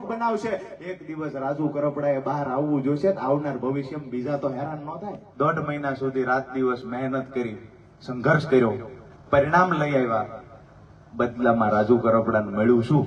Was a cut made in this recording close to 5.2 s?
yes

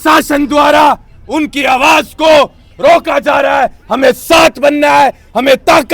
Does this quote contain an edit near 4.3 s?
no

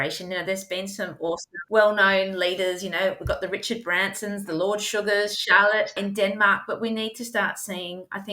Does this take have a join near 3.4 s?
no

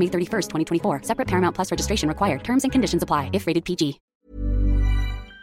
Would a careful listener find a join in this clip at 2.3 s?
no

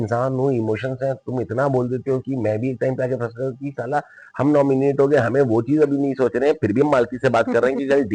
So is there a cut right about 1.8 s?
no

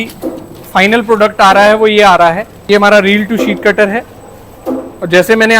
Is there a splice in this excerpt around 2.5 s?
yes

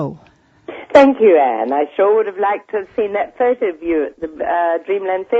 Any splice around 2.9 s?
no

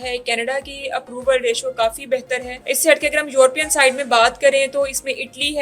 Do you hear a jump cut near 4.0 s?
no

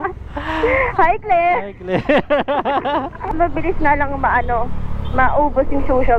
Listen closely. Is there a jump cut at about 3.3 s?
yes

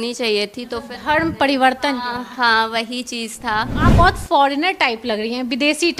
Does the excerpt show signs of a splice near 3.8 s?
yes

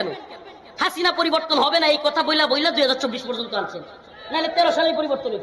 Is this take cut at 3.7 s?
no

